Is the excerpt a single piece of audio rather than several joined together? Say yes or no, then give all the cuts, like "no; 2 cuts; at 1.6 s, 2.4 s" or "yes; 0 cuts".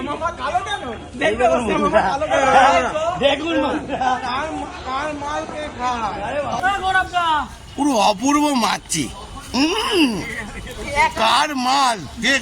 no; 1 cut; at 6.6 s